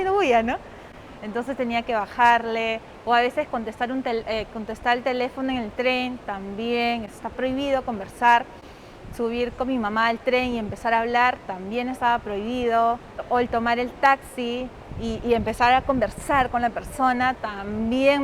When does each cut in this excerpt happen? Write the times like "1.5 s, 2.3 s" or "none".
none